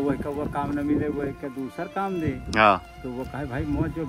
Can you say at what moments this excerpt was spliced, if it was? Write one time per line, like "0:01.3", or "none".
none